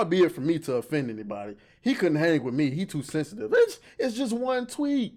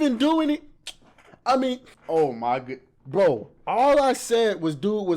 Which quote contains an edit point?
second; 1 cut; at 1.9 s

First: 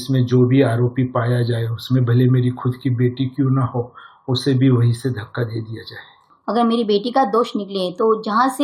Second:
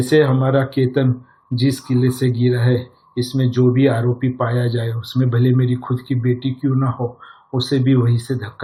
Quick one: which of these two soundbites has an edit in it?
first; 1 cut; at 6.3 s

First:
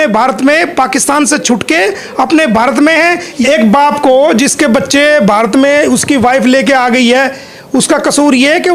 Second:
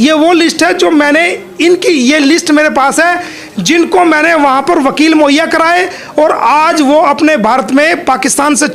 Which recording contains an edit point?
first; 1 cut; at 3.3 s

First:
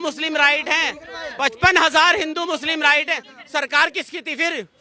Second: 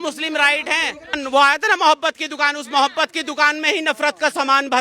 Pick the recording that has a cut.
second; 1 cut; at 1.2 s

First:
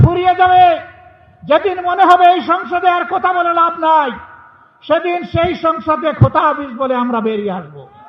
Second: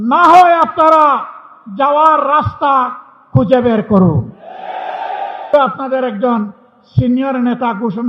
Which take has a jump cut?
second; 1 cut; at 5.5 s

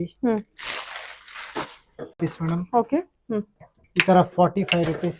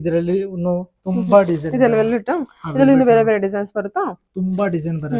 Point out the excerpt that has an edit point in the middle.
first; 1 cut; at 2.2 s

